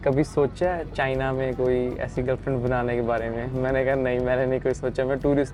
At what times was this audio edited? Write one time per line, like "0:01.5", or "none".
none